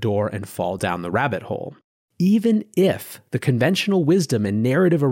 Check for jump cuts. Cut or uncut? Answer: cut